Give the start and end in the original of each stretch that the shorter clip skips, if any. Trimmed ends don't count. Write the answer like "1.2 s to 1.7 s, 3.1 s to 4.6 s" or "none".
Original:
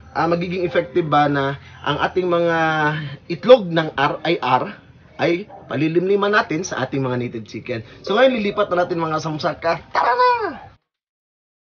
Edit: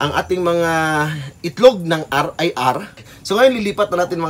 4.9 s to 7.9 s